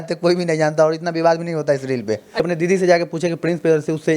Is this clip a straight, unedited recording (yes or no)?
no